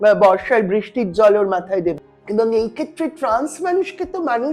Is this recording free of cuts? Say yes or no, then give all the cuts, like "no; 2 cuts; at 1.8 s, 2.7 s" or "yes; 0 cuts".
no; 1 cut; at 2.0 s